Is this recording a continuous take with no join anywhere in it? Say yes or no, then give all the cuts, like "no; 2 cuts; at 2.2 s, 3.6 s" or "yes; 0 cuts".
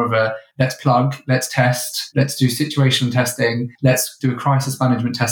yes; 0 cuts